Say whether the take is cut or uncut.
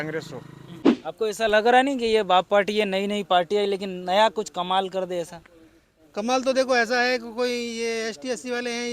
cut